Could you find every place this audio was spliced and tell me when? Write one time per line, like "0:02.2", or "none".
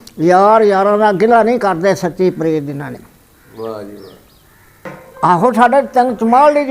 0:05.0